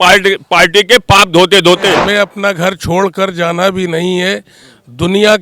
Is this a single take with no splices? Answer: no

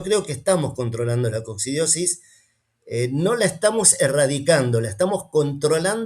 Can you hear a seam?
no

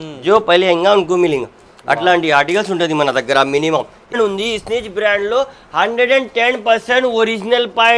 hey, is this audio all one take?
no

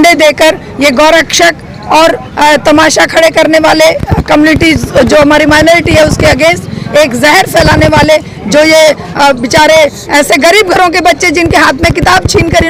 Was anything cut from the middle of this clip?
no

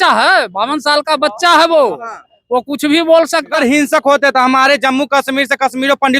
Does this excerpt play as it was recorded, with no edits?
no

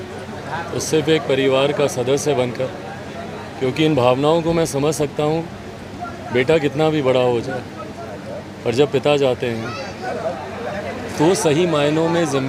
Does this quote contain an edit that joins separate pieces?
no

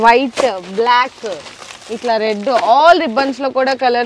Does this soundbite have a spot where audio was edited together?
no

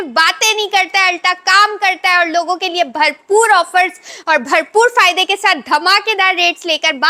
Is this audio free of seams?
yes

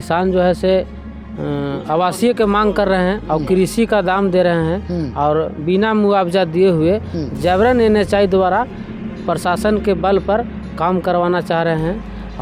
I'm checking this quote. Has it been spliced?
no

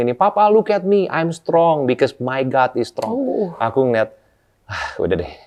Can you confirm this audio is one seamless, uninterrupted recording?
yes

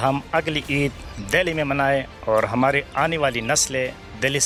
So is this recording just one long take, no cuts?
yes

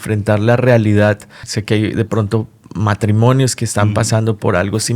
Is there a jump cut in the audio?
yes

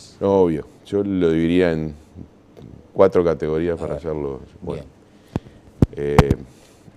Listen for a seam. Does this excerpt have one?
yes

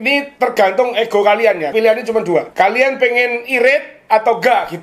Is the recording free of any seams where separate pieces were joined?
no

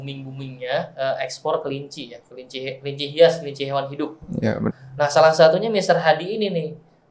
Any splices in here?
yes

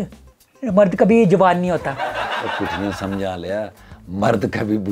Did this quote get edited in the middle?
no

